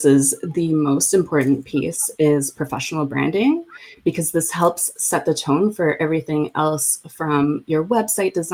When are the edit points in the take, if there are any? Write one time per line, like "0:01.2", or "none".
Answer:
none